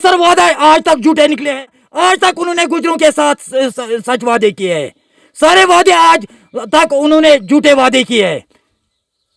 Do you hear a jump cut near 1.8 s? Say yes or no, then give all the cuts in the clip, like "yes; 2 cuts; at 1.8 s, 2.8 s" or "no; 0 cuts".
yes; 1 cut; at 1.8 s